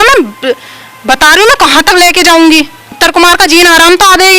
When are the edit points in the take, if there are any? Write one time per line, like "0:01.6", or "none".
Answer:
0:02.8

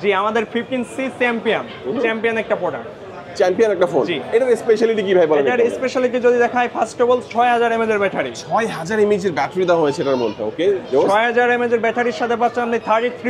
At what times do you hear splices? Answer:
none

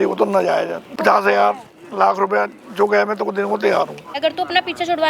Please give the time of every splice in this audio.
0:00.8
0:04.1

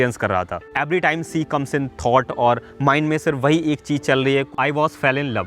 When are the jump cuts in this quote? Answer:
0:04.5

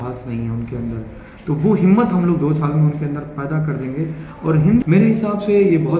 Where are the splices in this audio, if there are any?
0:04.8

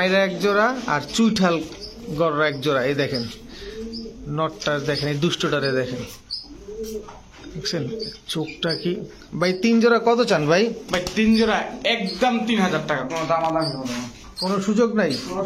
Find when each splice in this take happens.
none

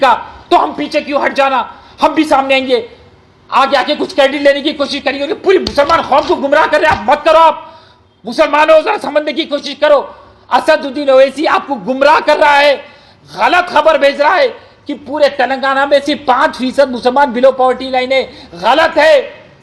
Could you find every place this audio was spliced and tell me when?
none

